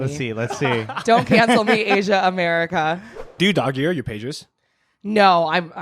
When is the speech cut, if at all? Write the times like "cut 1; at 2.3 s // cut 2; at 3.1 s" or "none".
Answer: cut 1; at 3.4 s